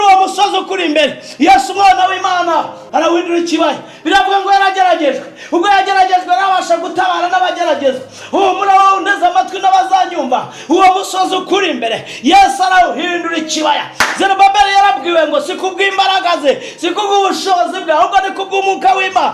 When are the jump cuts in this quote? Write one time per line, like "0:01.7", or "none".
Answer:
0:02.8